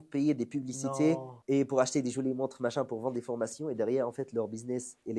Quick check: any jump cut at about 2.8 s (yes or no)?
no